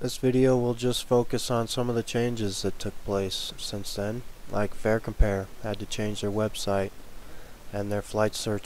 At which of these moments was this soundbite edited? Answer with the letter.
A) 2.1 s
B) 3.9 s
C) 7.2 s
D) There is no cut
A